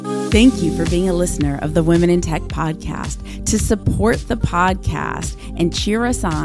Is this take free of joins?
yes; 0 cuts

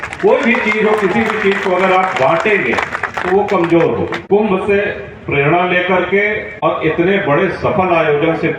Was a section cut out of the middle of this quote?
yes; 2 cuts; at 4.2 s, 6.5 s

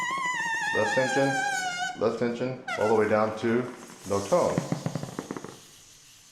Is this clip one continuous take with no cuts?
no; 1 cut; at 5.0 s

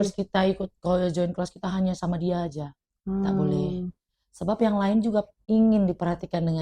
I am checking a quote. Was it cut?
yes; 1 cut; at 5.4 s

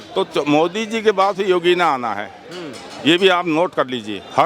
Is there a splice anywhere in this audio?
no; 0 cuts

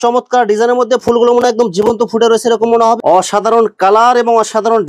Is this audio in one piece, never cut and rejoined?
no; 1 cut; at 3.0 s

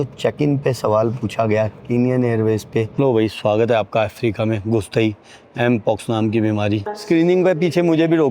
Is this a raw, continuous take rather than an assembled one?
no; 2 cuts; at 2.9 s, 6.9 s

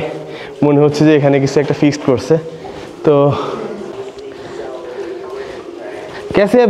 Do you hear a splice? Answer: yes; 1 cut; at 4.0 s

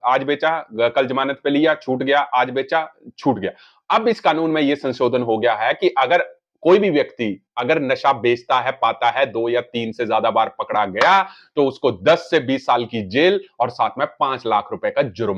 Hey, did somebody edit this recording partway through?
no; 0 cuts

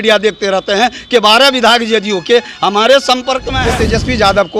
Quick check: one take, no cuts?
no; 1 cut; at 3.5 s

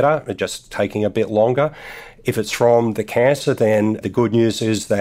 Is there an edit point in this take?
yes; 1 cut; at 4.0 s

